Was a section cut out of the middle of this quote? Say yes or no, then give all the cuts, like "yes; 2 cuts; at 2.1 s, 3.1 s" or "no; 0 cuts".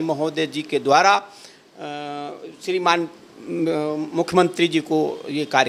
no; 0 cuts